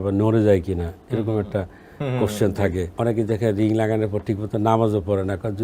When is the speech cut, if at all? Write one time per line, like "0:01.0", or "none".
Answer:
0:02.9